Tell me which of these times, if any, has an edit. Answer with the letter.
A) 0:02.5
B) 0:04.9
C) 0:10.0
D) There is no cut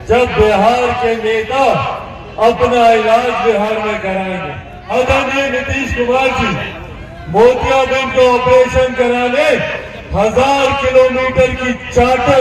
B